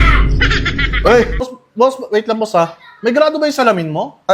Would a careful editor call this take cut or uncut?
cut